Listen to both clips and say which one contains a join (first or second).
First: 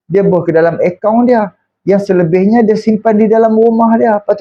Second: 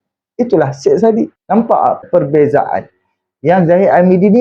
second